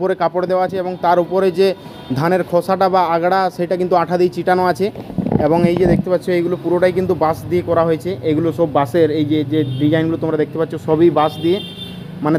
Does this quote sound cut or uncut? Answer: uncut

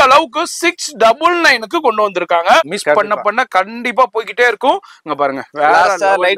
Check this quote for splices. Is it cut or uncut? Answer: cut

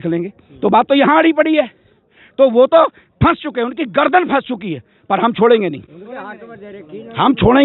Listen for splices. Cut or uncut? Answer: uncut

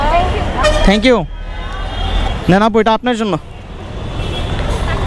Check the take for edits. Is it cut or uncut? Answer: cut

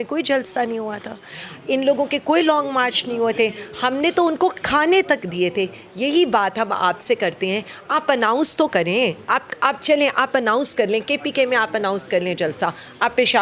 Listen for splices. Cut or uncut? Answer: uncut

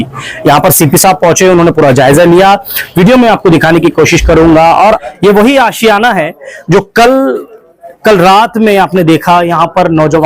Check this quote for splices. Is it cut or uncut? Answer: cut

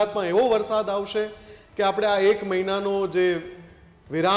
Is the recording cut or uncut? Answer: uncut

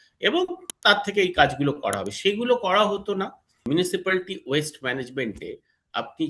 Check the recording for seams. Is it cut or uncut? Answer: cut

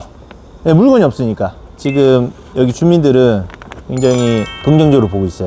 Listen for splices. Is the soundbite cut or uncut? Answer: cut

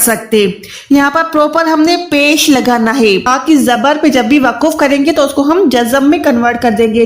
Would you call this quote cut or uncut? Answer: cut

